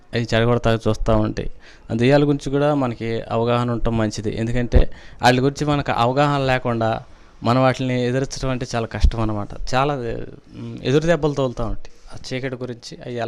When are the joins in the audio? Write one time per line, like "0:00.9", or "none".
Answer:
none